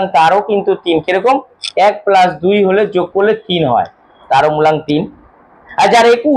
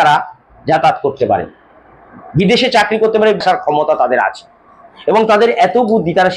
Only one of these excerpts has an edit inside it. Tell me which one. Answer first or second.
second